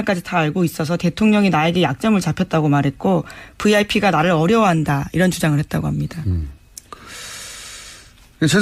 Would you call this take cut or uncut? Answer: uncut